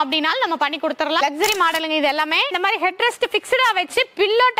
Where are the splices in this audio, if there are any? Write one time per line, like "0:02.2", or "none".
0:01.2
0:02.5